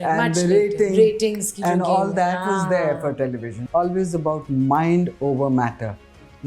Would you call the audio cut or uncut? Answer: cut